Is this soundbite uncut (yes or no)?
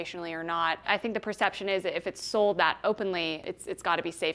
no